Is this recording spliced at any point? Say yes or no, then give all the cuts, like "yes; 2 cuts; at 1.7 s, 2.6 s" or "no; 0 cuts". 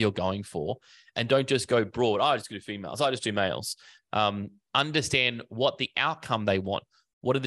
no; 0 cuts